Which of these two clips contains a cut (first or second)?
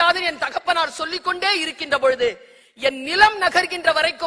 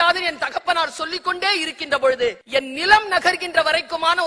second